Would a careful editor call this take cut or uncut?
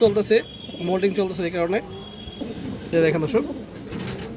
uncut